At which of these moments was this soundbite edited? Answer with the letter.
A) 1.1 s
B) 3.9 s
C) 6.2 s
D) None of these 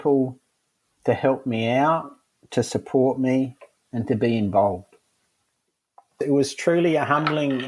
C